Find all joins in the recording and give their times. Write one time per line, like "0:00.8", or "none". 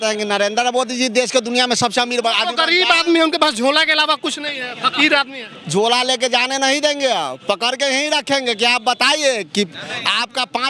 none